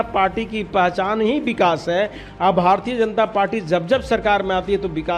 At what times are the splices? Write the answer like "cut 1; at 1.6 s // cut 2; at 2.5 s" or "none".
none